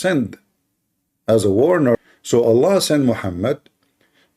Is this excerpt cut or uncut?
cut